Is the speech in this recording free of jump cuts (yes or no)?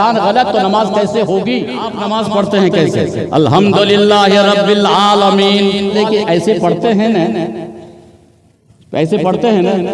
no